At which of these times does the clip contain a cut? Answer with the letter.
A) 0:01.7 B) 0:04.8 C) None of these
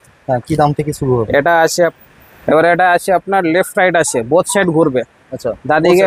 A